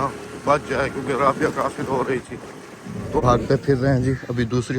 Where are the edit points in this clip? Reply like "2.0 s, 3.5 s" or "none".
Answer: 3.2 s